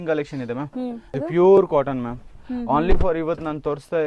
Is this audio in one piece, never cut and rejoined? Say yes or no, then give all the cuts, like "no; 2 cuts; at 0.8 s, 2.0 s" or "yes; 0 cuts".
no; 1 cut; at 1.1 s